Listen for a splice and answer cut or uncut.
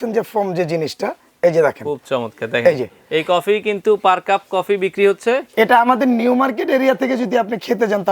uncut